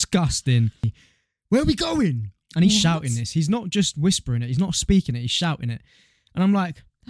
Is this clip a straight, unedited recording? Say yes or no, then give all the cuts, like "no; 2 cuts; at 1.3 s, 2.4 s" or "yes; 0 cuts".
no; 1 cut; at 0.9 s